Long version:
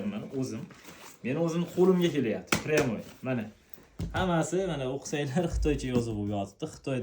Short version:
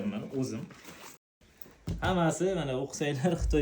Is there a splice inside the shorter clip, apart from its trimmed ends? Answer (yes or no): yes